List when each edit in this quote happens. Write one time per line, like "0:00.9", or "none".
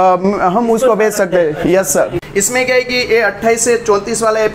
0:02.2

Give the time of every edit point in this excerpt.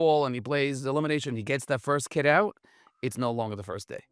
none

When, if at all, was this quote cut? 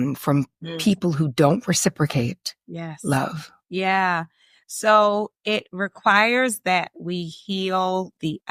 none

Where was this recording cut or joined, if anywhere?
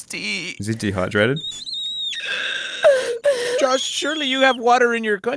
none

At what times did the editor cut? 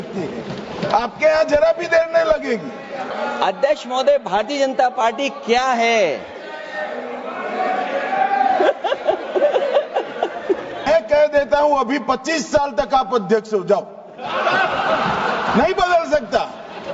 0:03.1
0:10.9

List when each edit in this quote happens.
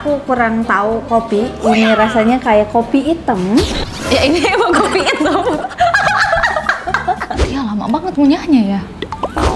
0:07.4

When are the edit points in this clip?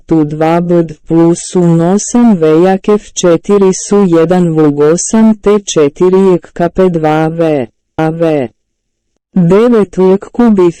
none

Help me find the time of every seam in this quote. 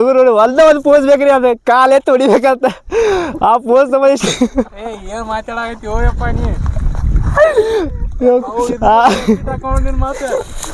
none

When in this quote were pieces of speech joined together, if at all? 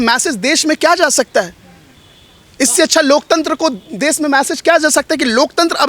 none

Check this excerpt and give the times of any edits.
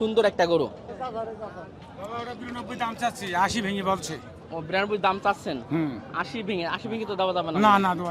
none

